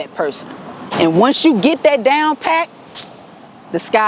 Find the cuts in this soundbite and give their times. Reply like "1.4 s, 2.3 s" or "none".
0.9 s